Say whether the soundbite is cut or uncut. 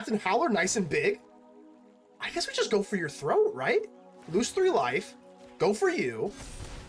uncut